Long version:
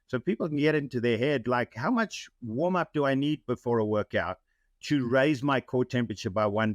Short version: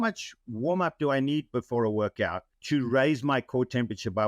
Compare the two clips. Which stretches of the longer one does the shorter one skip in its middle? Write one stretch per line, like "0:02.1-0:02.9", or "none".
0:04.4-0:04.7